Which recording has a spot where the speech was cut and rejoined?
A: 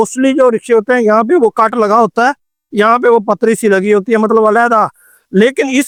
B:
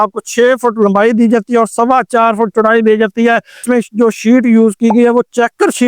B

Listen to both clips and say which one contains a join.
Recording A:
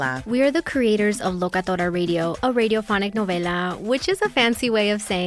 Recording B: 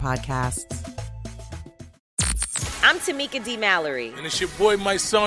B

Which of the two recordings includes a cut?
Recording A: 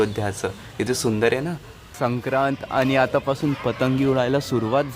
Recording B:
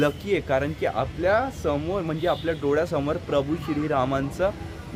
A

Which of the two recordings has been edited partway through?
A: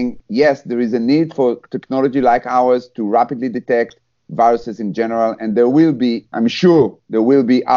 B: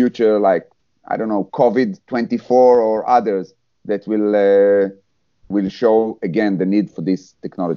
A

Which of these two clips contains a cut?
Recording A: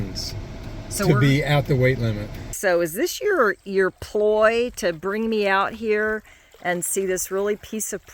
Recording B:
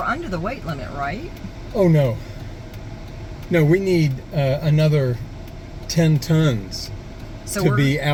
A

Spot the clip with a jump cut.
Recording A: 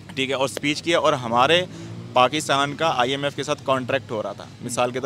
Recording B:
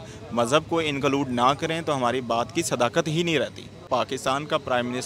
B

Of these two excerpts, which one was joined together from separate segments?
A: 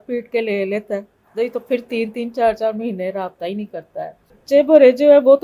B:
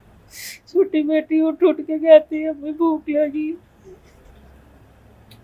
A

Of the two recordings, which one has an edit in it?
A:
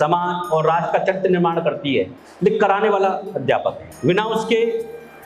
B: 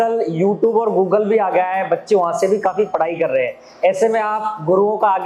A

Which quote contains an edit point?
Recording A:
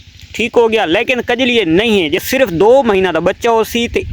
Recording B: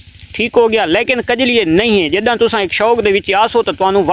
A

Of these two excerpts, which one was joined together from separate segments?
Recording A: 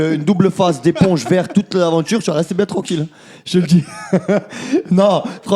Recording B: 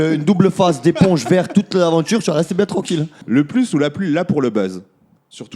B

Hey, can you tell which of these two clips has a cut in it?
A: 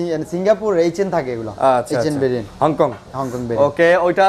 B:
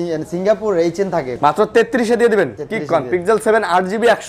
B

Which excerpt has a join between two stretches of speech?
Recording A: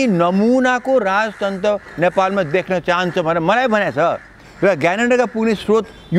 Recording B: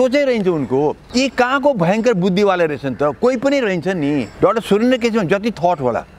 B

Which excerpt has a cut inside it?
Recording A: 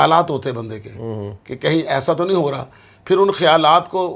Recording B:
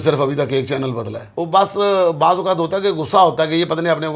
B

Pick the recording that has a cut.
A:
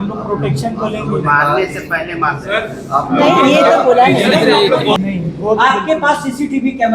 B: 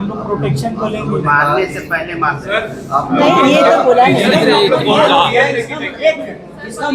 A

